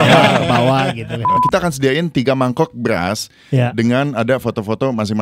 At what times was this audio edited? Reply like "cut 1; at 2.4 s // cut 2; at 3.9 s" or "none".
cut 1; at 1.2 s